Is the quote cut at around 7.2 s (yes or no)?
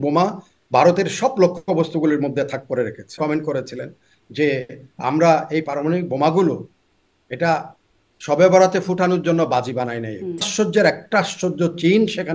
no